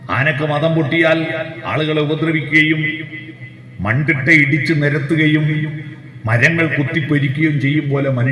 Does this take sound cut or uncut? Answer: uncut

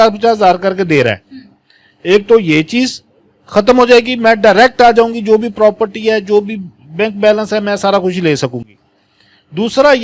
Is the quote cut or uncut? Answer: uncut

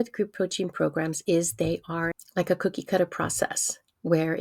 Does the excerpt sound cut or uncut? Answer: cut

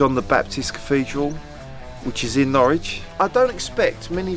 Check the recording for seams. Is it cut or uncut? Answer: cut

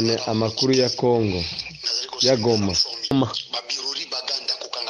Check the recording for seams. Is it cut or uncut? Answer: cut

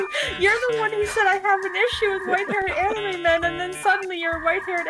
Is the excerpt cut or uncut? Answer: uncut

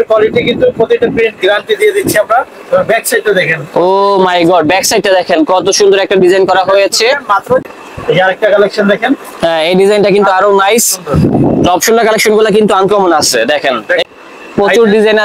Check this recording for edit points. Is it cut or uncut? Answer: cut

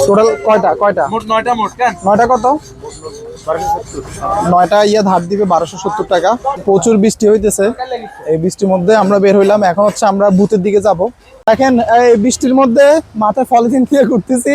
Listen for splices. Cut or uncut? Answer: cut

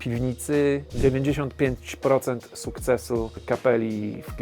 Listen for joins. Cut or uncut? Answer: cut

